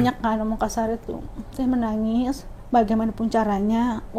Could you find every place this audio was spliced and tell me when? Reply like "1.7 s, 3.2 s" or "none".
2.5 s